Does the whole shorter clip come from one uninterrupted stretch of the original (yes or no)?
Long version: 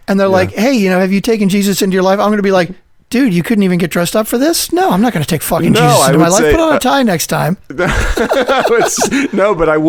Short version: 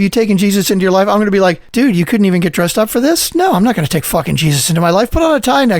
no